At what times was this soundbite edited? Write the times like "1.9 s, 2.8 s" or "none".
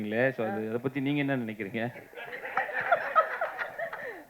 none

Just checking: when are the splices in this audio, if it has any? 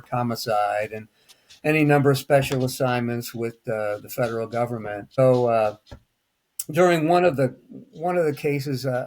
5.2 s

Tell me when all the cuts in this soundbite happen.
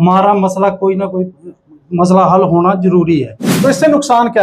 3.4 s

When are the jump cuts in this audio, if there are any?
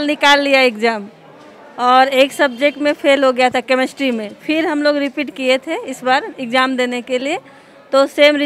none

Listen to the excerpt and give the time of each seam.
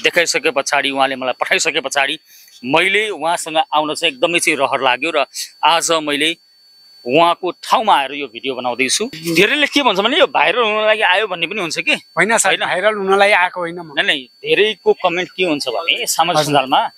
9.2 s

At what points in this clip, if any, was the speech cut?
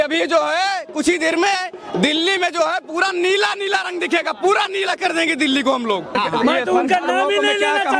6.2 s

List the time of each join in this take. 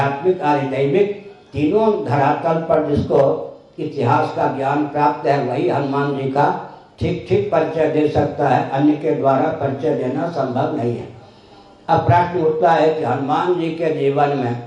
none

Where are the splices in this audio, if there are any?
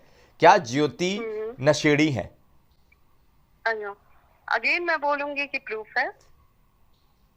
none

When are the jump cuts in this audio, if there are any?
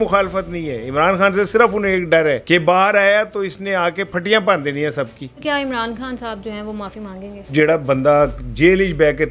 2.4 s, 5.2 s, 7.5 s

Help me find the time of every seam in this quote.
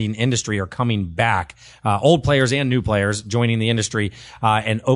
none

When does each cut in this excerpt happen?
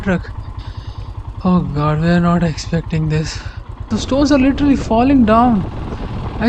3.8 s

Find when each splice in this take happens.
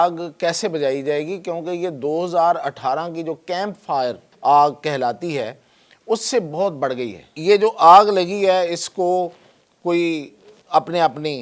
4.3 s, 7.3 s

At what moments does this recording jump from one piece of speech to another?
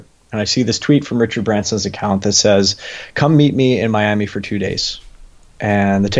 none

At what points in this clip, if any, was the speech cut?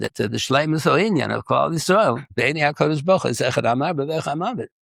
none

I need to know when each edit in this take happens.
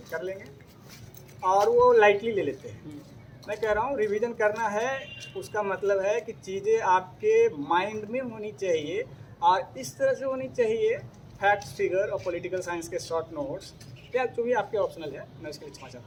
none

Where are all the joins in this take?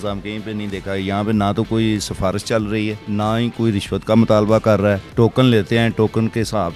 3.0 s, 5.1 s

